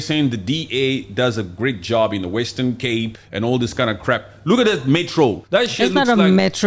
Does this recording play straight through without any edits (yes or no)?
no